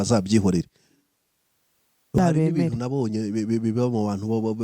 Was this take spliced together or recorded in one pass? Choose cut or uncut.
cut